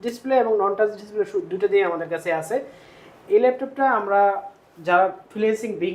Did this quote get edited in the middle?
no; 0 cuts

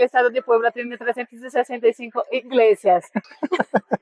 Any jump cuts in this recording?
yes; 1 cut; at 3.1 s

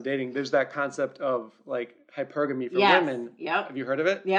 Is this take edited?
no; 0 cuts

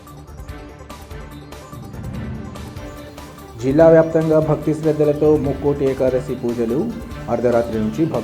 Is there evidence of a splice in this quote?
yes; 1 cut; at 2.2 s

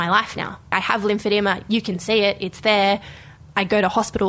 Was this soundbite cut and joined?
no; 0 cuts

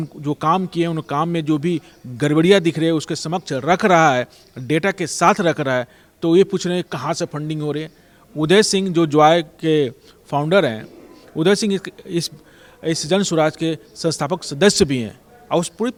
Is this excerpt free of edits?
yes; 0 cuts

